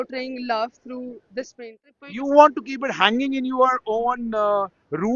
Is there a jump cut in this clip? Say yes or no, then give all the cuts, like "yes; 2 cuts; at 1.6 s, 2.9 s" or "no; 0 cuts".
yes; 1 cut; at 1.9 s